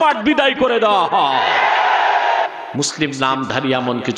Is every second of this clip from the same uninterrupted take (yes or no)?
no